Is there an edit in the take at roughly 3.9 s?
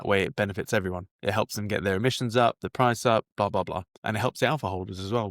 yes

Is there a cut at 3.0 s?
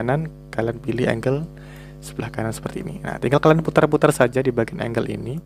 no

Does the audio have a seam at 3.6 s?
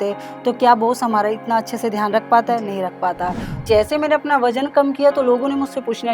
yes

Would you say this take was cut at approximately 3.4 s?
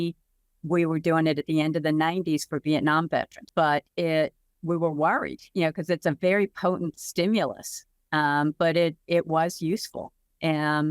yes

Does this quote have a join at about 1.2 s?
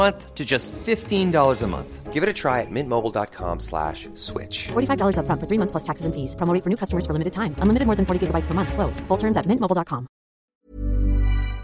no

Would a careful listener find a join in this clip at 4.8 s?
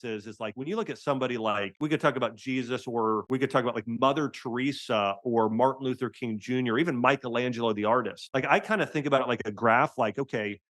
no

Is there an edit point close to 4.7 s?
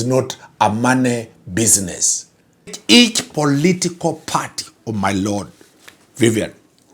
no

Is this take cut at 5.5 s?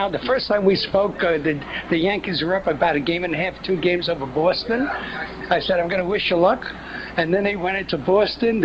yes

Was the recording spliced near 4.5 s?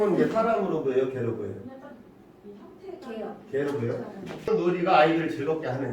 yes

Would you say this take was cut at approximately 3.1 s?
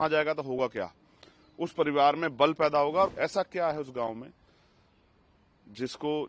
yes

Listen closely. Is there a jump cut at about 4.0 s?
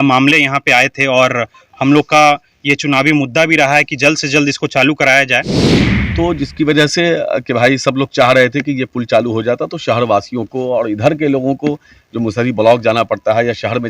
no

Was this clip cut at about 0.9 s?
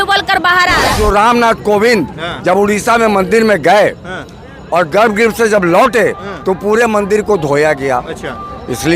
yes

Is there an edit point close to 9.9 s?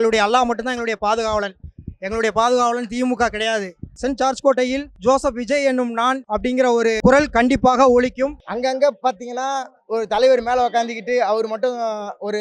no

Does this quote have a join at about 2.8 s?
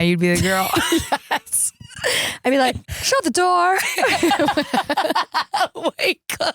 yes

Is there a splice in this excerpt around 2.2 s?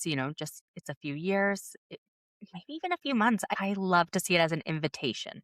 no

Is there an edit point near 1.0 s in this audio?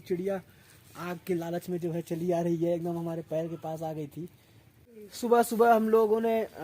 no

